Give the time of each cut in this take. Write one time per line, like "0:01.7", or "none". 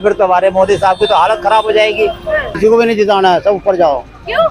0:02.5